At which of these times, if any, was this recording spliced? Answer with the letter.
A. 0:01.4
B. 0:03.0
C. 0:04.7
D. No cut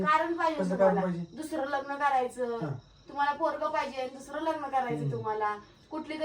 D